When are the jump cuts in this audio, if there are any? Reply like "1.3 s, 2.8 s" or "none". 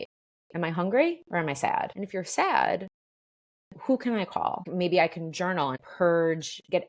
2.0 s, 4.6 s, 5.8 s